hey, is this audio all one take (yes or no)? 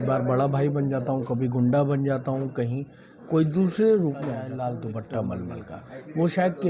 no